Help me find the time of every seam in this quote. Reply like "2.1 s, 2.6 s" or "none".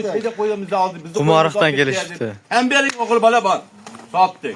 none